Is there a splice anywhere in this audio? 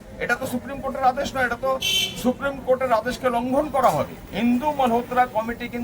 yes; 1 cut; at 4.2 s

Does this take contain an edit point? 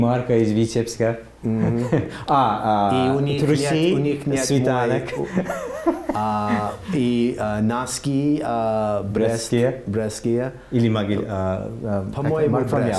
no; 0 cuts

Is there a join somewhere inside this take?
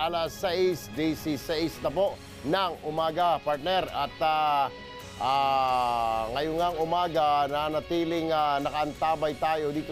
yes; 1 cut; at 1.4 s

